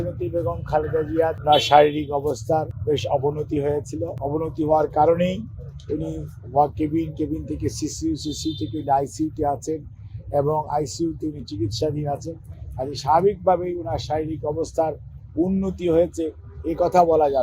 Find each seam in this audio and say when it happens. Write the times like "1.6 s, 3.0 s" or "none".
1.4 s, 2.7 s, 4.2 s